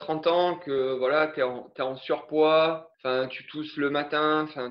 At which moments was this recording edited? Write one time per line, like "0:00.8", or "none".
0:02.9